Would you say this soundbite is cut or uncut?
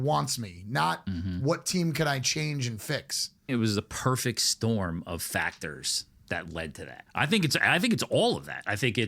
cut